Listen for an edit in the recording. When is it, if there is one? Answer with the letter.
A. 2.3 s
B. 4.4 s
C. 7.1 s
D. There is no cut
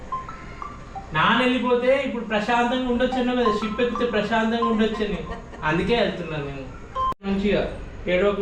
C